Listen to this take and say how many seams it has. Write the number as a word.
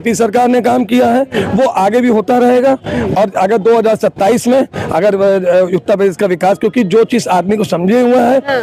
zero